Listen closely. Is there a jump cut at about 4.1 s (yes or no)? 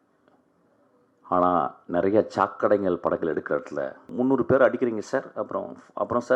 yes